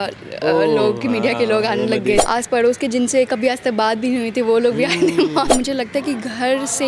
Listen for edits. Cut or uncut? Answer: cut